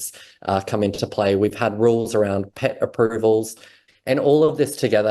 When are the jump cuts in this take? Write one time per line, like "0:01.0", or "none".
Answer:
0:03.8